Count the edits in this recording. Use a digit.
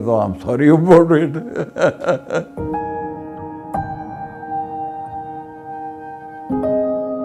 1